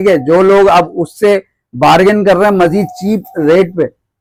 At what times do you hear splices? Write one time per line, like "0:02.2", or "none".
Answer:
none